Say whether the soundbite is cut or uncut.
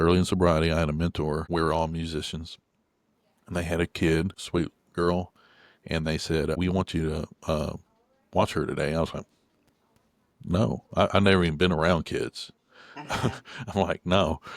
cut